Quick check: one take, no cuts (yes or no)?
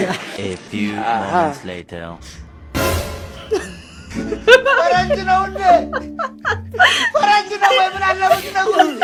yes